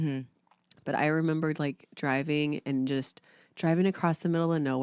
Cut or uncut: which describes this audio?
uncut